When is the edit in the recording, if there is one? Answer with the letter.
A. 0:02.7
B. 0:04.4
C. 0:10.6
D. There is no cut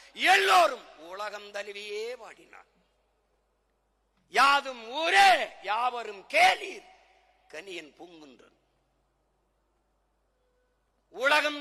D